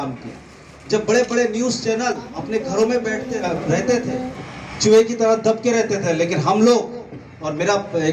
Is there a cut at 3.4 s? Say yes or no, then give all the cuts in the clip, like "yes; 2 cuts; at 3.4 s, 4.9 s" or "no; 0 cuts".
yes; 2 cuts; at 2.3 s, 3.4 s